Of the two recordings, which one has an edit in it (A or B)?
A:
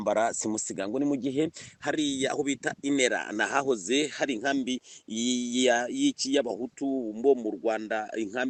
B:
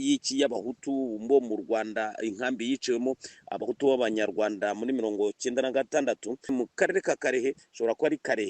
B